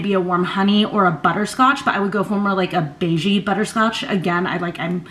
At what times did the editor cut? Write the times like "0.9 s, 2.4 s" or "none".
none

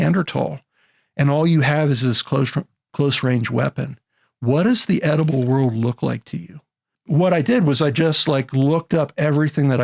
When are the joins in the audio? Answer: 7.0 s

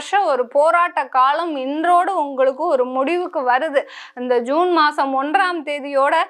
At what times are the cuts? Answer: none

